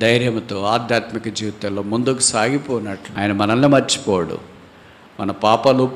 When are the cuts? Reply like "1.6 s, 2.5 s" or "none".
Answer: 3.0 s